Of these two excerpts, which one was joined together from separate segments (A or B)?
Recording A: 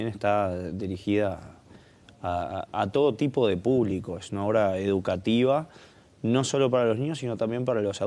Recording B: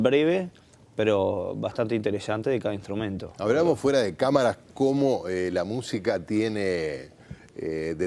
B